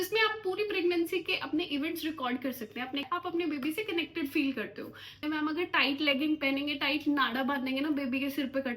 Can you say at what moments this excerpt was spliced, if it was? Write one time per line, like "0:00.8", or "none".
0:03.0
0:05.2